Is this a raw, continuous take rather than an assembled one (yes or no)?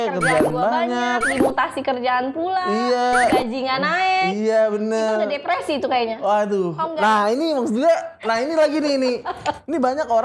yes